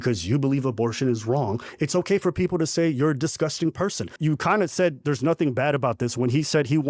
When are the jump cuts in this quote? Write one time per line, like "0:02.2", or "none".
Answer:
0:04.1